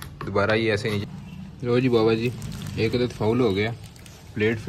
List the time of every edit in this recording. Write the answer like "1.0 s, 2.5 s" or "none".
1.0 s